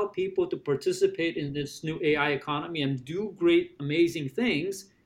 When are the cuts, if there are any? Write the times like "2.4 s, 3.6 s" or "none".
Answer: none